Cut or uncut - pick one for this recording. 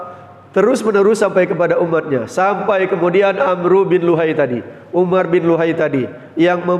uncut